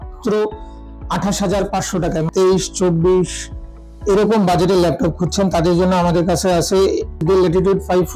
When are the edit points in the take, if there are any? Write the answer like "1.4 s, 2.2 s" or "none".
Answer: 2.3 s, 7.2 s